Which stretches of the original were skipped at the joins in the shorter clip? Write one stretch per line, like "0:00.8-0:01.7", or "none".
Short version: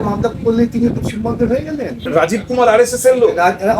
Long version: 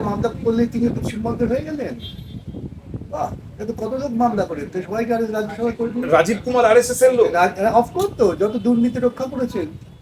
0:02.0-0:06.0